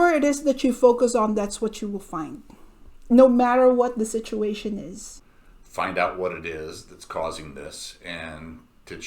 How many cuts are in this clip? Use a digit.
1